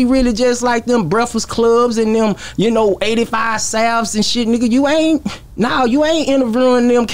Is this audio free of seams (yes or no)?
yes